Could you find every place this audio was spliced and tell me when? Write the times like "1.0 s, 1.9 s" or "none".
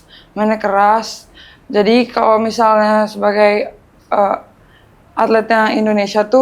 none